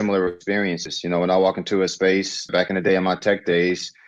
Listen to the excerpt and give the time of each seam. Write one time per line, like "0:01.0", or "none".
0:02.5